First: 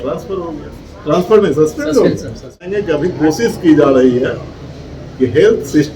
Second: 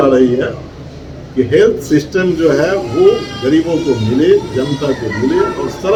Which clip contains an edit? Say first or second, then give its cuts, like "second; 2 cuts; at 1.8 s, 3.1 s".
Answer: first; 1 cut; at 2.7 s